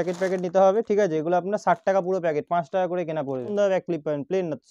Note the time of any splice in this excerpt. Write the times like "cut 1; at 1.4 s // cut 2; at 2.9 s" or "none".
cut 1; at 3.5 s